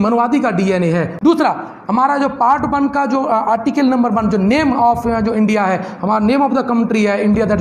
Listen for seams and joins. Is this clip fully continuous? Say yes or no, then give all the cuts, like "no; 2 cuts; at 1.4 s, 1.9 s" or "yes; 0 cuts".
no; 1 cut; at 1.1 s